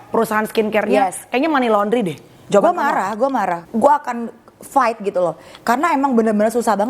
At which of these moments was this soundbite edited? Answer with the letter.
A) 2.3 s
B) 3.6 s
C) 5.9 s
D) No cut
B